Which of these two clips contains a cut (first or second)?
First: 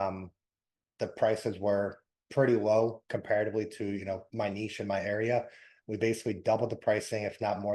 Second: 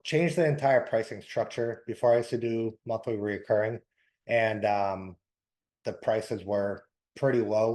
first